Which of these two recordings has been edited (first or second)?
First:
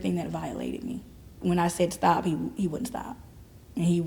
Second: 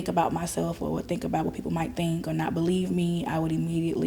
first